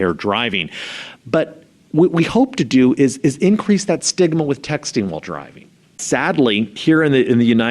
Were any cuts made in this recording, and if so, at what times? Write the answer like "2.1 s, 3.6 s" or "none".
6.0 s, 6.8 s